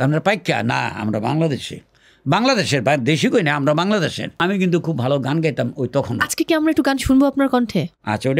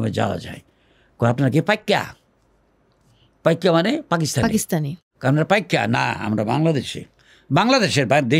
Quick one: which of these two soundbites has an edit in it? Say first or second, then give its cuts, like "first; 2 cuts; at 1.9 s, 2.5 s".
first; 1 cut; at 4.3 s